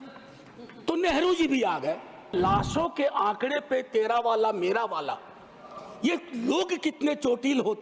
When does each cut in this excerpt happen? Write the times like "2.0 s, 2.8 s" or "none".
2.3 s